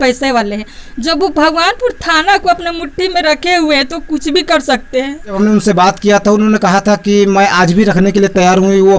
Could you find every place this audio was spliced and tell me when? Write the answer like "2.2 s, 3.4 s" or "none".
5.3 s